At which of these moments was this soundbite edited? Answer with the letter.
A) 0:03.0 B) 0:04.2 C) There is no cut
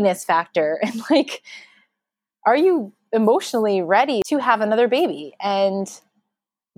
B